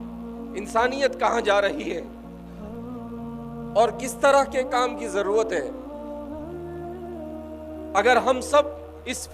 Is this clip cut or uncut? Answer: cut